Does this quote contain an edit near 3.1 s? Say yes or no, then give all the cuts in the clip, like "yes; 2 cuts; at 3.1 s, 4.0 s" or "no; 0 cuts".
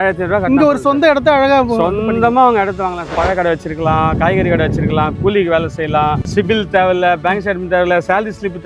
yes; 2 cuts; at 3.1 s, 6.2 s